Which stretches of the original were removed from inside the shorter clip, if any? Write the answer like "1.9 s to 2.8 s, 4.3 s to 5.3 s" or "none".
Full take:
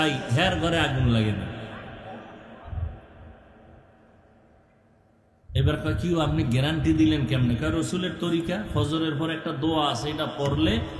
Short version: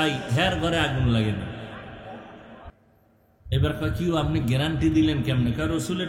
2.7 s to 4.7 s